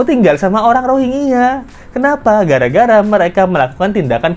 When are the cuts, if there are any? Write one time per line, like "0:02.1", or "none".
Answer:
none